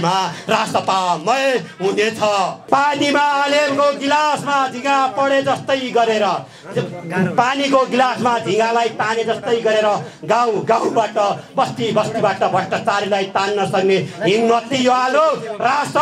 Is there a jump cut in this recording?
yes; 1 cut; at 2.6 s

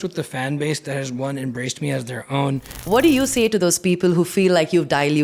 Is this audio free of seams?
no; 1 cut; at 2.7 s

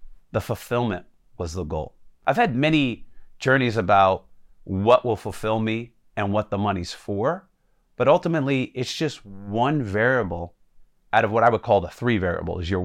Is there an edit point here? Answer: yes; 1 cut; at 2.1 s

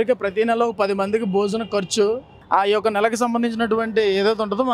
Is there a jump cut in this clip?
no; 0 cuts

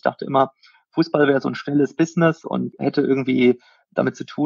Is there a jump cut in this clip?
yes; 1 cut; at 2.8 s

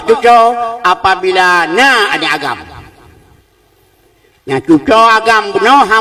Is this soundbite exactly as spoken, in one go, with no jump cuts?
yes; 0 cuts

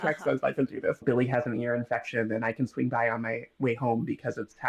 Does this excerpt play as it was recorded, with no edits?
no; 1 cut; at 1.0 s

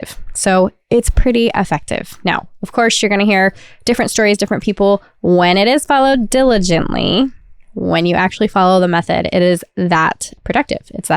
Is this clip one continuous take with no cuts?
no; 1 cut; at 10.3 s

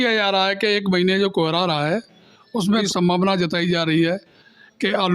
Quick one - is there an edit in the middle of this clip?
yes; 1 cut; at 2.7 s

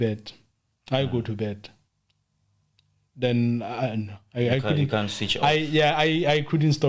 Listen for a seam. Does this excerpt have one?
no; 0 cuts

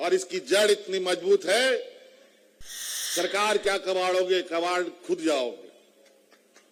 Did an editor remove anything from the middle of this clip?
no; 0 cuts

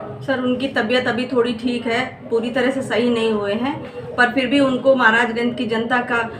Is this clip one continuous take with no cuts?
yes; 0 cuts

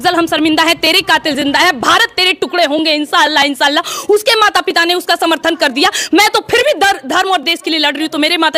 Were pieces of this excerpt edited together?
no; 0 cuts

